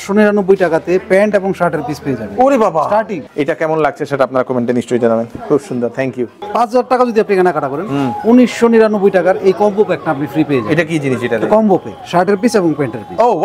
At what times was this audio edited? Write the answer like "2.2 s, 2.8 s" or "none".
3.2 s, 6.4 s

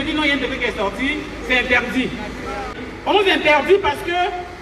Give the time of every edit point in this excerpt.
2.7 s

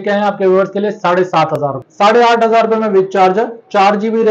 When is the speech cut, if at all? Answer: 1.8 s

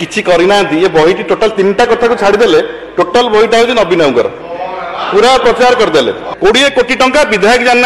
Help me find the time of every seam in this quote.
6.2 s

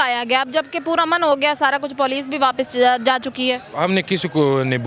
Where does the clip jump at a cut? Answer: none

